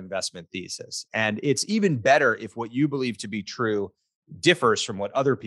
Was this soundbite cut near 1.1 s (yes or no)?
no